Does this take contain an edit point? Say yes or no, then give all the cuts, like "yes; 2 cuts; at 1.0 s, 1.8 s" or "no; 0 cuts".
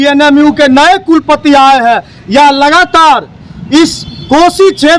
no; 0 cuts